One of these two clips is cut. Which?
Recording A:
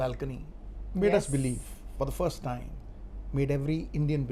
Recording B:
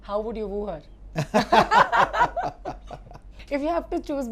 B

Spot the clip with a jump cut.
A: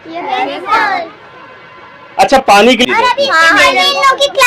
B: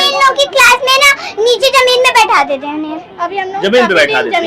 A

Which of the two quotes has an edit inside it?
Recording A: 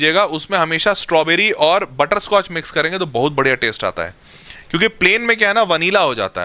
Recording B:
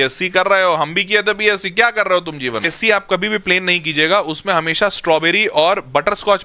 B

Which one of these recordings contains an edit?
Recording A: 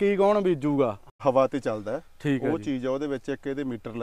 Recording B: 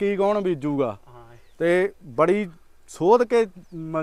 A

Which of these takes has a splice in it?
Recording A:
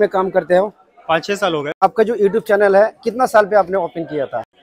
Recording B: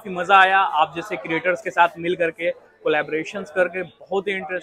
A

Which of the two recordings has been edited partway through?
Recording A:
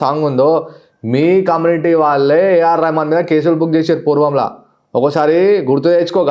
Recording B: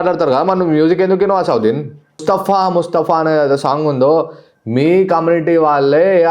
B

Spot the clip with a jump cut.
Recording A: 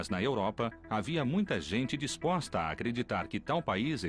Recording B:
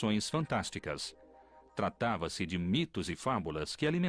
B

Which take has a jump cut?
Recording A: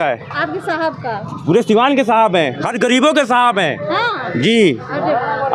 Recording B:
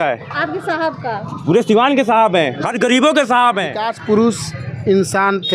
B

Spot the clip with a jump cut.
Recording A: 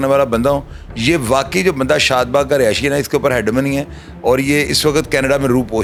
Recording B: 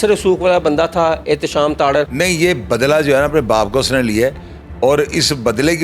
B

